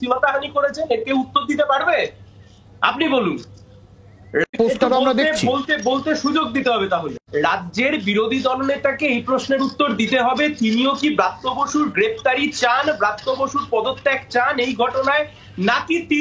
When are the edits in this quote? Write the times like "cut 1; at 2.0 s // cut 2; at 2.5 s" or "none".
cut 1; at 4.5 s // cut 2; at 7.2 s